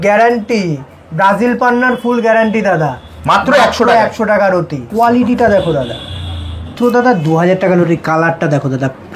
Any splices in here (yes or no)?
yes